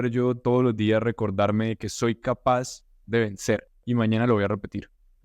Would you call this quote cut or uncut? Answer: uncut